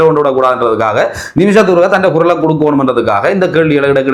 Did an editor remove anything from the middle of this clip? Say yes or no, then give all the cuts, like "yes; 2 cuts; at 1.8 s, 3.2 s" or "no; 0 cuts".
no; 0 cuts